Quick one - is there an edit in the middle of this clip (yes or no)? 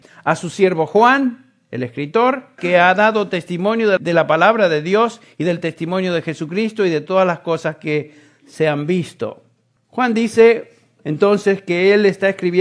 no